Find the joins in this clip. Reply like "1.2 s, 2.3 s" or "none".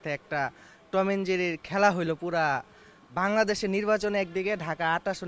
none

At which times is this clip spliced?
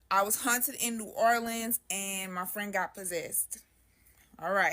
none

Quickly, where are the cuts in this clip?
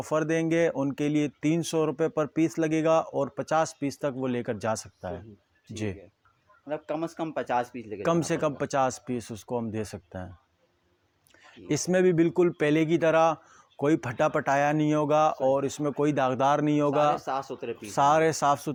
none

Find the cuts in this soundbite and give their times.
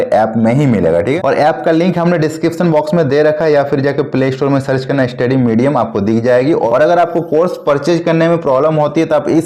1.2 s, 6.7 s

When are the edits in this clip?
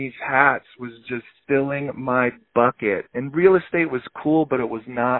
1.3 s

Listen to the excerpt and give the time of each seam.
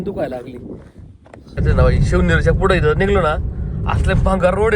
1.5 s

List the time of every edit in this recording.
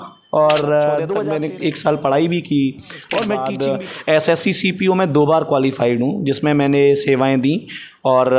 1.2 s, 3.4 s

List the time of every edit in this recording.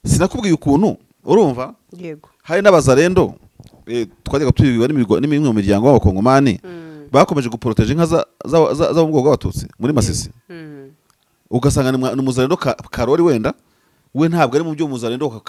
none

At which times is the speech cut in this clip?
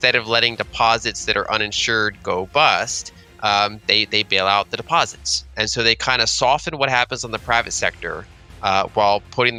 none

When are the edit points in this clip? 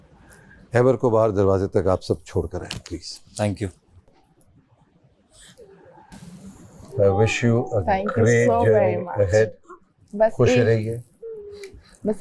4.2 s

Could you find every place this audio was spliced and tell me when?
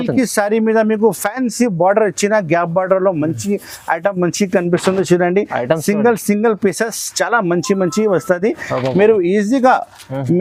none

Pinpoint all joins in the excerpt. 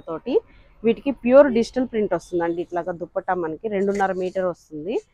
none

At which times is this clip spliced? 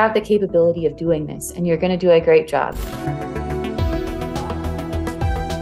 2.9 s

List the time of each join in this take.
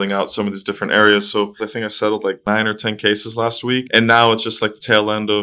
1.6 s

